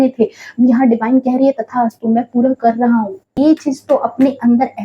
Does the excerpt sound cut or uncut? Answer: cut